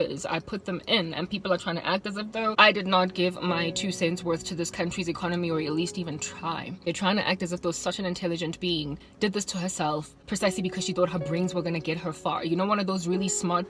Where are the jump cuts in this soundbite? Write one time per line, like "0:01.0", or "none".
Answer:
0:02.5
0:06.7
0:09.0
0:10.2